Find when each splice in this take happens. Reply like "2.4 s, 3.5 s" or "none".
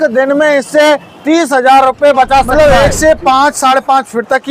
2.5 s